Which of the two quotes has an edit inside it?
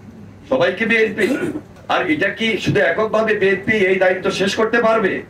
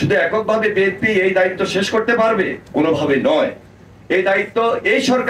first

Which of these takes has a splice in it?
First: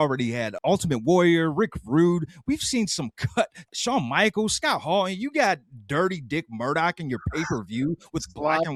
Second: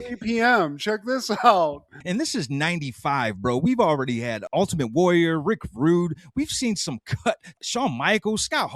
second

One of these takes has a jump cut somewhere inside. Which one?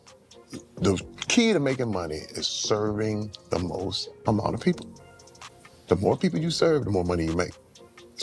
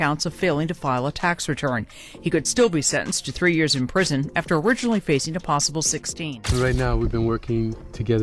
second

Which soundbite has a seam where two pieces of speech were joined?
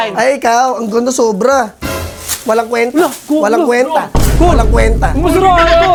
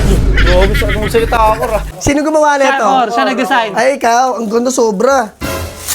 second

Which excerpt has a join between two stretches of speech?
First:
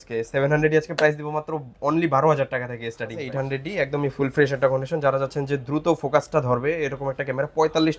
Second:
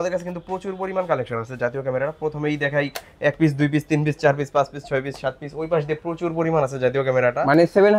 first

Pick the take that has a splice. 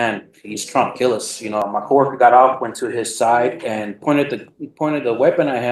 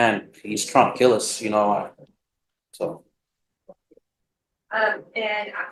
first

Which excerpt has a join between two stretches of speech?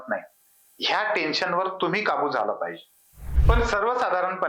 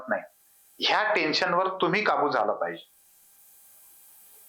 first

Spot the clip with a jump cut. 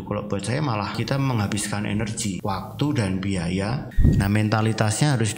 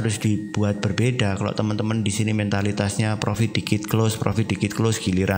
first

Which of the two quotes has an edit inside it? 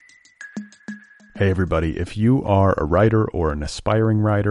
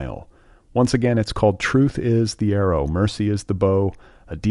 first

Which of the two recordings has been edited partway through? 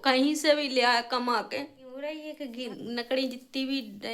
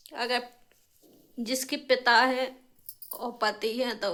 first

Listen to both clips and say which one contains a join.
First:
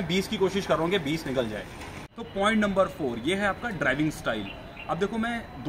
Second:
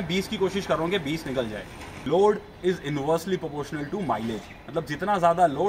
second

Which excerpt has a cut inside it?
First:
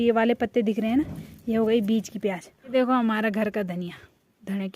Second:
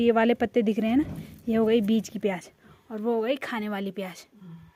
first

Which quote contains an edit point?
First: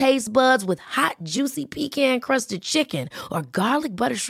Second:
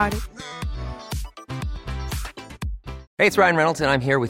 second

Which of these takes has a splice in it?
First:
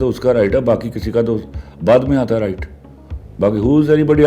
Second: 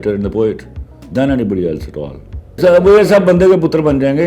second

